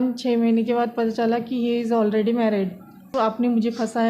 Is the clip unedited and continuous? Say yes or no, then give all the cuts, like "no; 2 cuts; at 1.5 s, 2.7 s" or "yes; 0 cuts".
no; 1 cut; at 3.1 s